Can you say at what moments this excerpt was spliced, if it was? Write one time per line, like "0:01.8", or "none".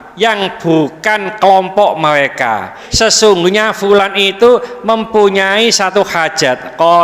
0:02.8